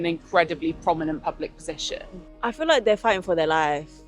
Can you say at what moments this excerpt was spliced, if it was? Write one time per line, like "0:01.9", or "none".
0:02.3

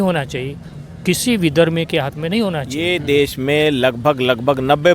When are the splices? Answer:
0:02.7

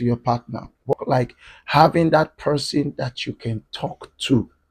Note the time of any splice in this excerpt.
0:00.9

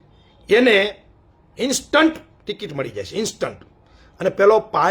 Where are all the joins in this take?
none

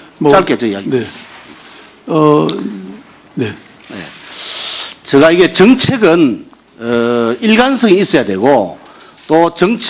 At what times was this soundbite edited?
0:06.8

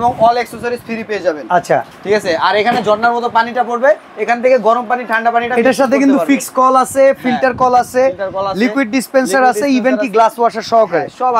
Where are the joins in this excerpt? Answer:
none

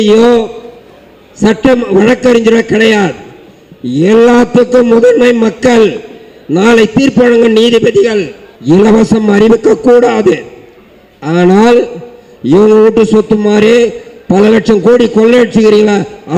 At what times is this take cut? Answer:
0:08.5

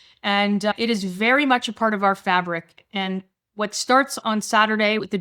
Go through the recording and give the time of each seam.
0:04.2

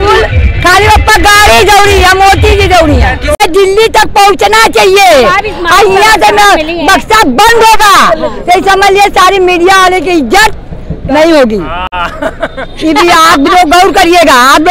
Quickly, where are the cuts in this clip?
0:03.4

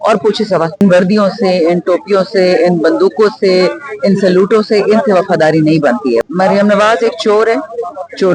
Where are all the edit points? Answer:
0:00.8
0:06.2

